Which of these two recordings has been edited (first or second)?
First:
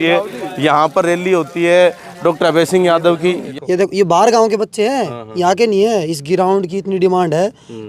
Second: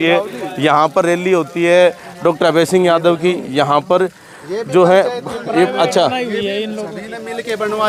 first